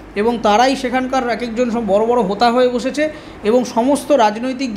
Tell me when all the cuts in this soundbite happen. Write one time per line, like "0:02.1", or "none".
none

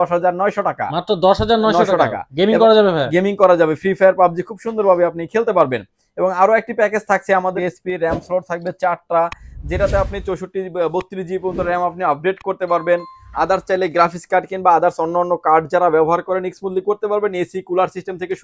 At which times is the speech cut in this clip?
0:07.6

